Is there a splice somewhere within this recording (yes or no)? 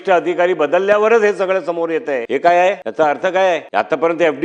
yes